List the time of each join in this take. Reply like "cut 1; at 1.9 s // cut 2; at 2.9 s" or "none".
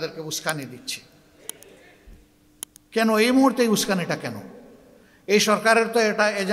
none